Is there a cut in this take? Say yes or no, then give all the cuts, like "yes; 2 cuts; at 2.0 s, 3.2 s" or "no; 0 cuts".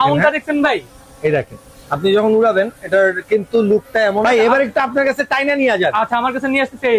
yes; 1 cut; at 4.2 s